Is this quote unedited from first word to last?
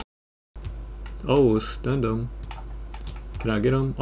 yes; 0 cuts

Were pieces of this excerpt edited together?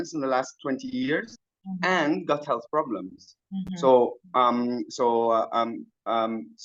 no; 0 cuts

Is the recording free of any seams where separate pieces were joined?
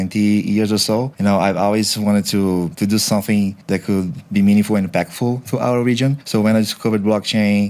no; 1 cut; at 2.7 s

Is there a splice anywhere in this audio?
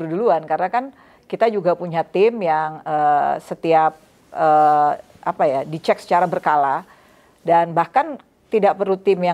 no; 0 cuts

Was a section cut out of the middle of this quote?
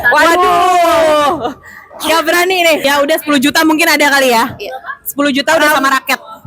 yes; 1 cut; at 2.8 s

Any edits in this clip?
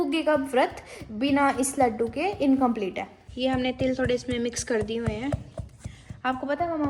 no; 0 cuts

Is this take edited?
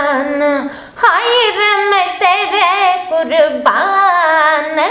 no; 0 cuts

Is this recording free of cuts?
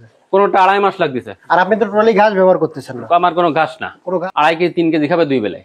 no; 2 cuts; at 1.3 s, 4.2 s

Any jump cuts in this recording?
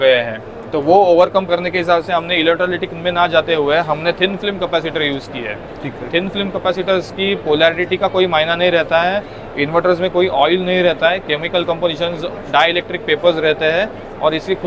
no; 0 cuts

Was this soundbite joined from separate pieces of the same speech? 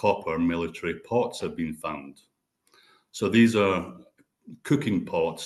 no; 0 cuts

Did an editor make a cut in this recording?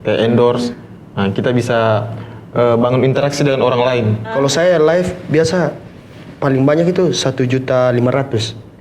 yes; 1 cut; at 4.3 s

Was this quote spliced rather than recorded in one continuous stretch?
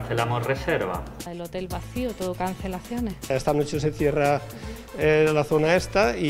yes; 2 cuts; at 1.4 s, 3.3 s

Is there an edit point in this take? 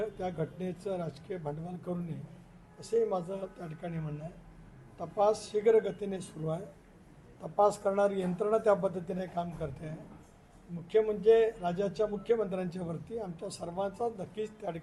no; 0 cuts

